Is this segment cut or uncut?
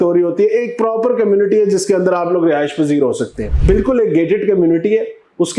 cut